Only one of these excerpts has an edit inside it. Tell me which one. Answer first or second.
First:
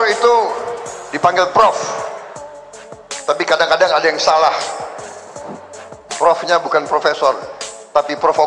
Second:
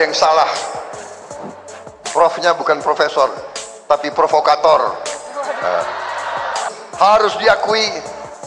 second